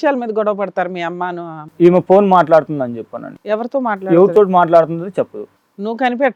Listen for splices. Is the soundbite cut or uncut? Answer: uncut